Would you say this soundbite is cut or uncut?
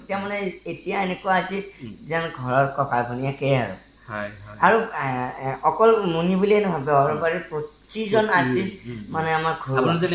uncut